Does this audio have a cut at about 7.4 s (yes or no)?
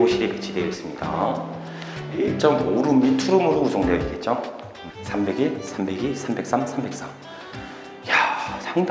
no